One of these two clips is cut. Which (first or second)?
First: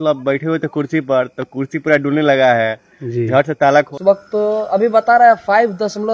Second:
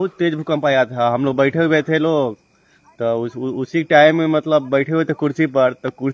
first